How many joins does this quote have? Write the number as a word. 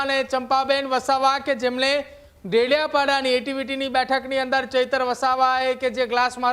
zero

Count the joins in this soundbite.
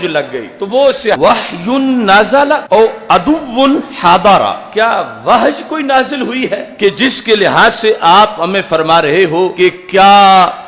one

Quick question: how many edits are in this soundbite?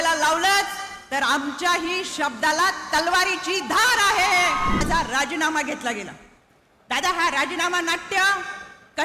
one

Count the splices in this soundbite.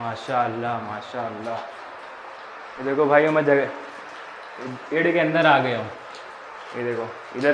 zero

